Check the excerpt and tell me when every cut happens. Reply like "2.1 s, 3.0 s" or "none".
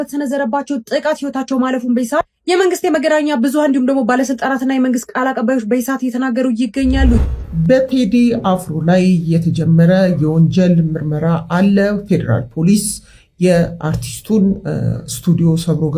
7.2 s